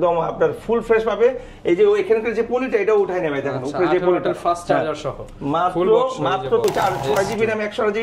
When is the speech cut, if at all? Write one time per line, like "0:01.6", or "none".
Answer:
0:06.6